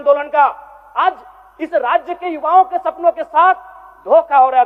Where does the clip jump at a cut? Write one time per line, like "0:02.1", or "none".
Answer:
none